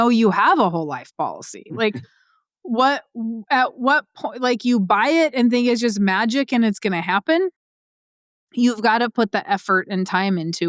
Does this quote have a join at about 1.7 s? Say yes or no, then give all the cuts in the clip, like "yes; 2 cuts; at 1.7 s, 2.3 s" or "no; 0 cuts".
no; 0 cuts